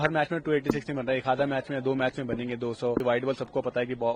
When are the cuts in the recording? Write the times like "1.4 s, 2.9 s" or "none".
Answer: 3.0 s